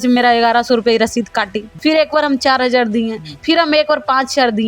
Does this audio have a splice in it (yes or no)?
yes